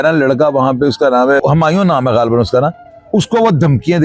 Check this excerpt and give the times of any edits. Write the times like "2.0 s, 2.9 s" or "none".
none

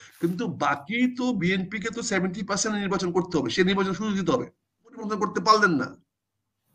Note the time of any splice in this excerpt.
5.0 s

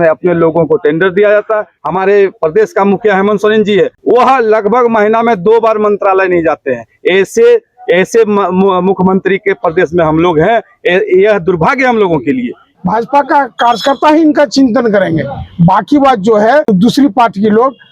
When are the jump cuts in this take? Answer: 1.7 s, 4.0 s, 12.6 s, 16.7 s

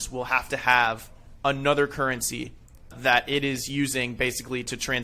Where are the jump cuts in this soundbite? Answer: 2.9 s

